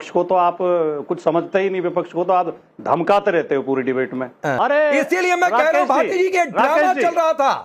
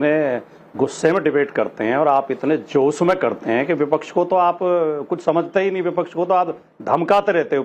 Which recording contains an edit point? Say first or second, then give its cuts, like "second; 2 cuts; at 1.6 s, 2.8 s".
first; 1 cut; at 4.5 s